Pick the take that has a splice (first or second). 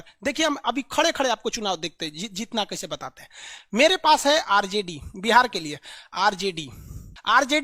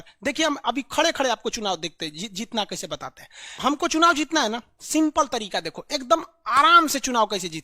second